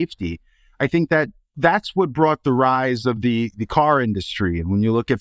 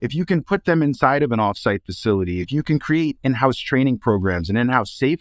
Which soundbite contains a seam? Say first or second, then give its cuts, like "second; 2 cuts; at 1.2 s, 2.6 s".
first; 1 cut; at 1.5 s